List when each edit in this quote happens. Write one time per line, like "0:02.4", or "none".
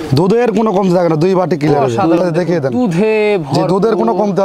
0:02.2

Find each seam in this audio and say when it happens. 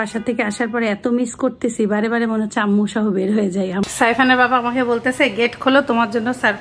0:03.8

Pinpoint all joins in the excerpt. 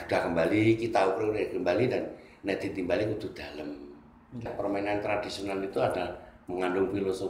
0:04.5

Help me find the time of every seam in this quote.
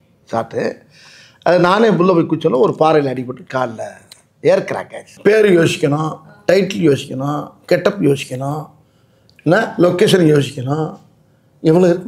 0:05.0

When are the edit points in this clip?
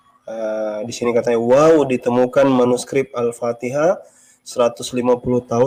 none

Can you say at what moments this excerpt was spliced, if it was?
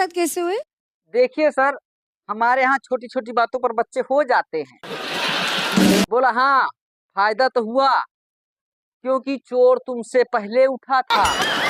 0:06.0

